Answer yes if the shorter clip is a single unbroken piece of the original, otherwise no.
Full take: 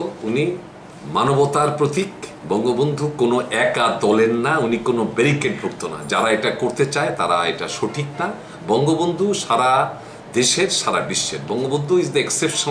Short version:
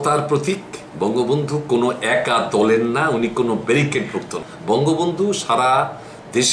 no